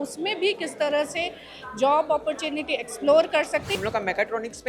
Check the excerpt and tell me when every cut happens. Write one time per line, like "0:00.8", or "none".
0:03.8